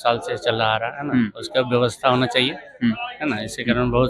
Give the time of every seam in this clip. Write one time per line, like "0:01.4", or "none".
none